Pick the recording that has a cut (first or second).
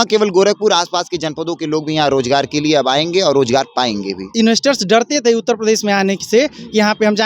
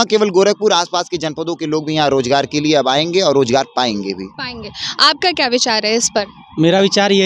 first